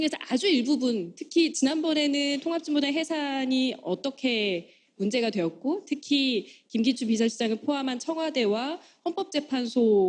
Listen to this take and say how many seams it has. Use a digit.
1